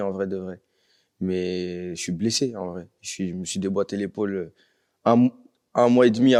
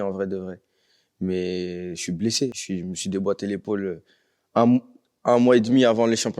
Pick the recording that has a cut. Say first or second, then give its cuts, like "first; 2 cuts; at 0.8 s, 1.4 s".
second; 1 cut; at 2.6 s